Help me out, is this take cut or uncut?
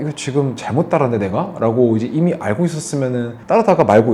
uncut